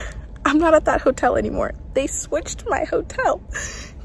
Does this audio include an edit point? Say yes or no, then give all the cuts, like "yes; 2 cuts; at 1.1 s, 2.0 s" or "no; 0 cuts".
no; 0 cuts